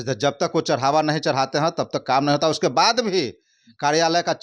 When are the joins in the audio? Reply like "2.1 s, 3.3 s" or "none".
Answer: none